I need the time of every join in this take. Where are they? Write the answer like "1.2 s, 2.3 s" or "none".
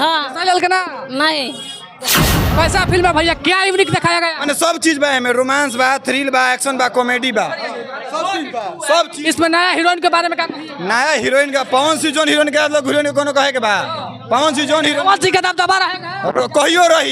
2.2 s